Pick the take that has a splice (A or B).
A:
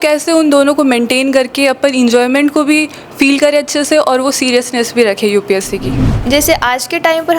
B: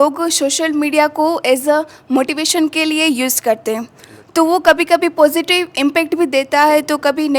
A